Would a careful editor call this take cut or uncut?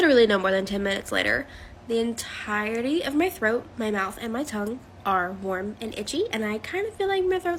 uncut